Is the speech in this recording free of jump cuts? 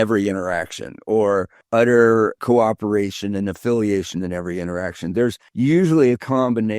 no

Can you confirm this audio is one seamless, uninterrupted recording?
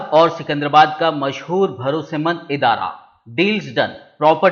yes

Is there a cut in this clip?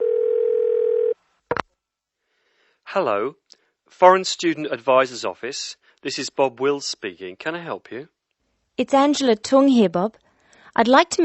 yes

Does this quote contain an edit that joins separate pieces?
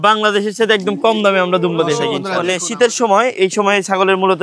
yes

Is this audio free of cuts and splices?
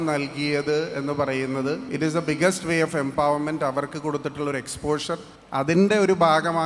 no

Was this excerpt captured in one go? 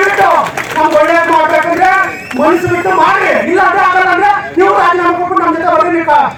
yes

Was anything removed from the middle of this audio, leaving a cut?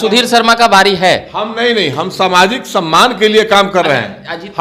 no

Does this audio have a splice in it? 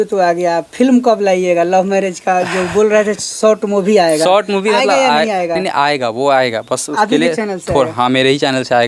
no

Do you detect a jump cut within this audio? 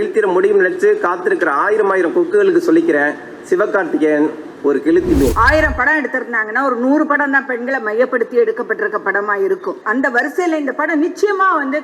yes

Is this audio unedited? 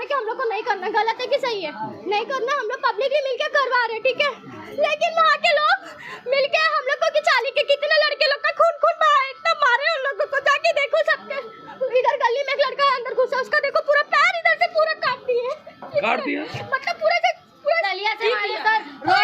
yes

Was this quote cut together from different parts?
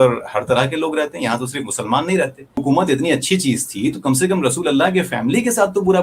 yes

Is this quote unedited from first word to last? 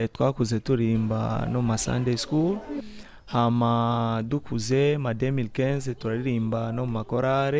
yes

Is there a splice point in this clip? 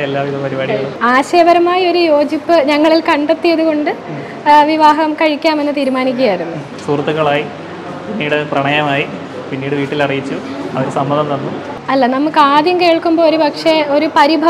yes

